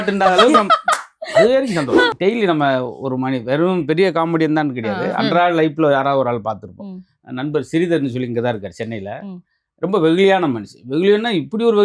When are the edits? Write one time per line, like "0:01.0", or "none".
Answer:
0:02.1